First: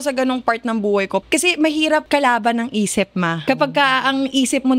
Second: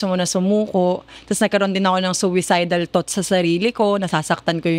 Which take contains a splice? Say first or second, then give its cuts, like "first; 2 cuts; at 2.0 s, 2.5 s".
first; 3 cuts; at 1.2 s, 2.0 s, 3.4 s